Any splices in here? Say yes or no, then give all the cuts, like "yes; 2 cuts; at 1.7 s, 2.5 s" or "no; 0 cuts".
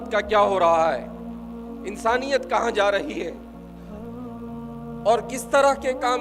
yes; 2 cuts; at 3.3 s, 4.7 s